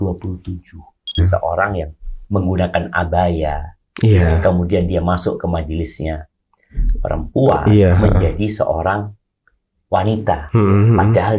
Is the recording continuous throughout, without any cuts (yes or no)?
no